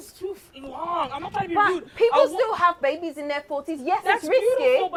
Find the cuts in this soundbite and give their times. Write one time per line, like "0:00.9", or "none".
none